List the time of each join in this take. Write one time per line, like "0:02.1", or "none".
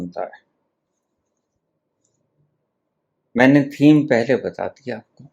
0:01.6